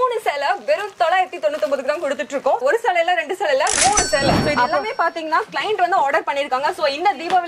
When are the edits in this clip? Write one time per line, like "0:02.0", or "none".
0:02.6
0:04.4